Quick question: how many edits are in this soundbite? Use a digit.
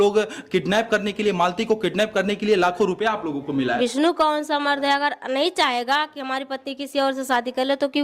1